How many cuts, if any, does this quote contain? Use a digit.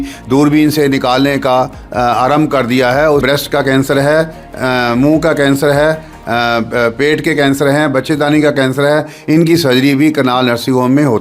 1